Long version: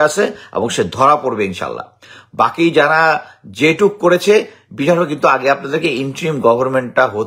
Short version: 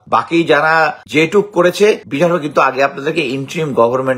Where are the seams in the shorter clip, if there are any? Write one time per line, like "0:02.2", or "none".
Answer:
0:01.0
0:02.1